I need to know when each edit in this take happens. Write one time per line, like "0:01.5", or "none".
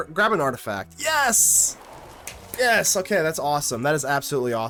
none